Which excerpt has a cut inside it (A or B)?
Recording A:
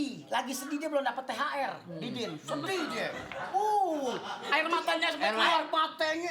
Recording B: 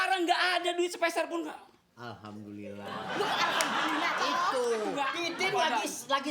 B